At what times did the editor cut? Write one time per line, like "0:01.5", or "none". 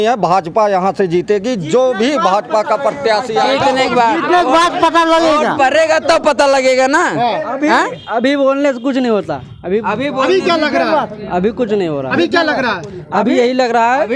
none

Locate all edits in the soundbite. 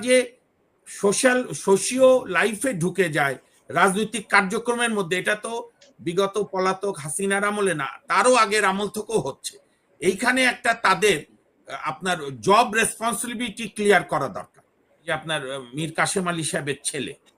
0:15.1

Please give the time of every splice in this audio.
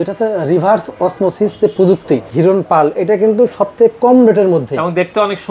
0:02.3

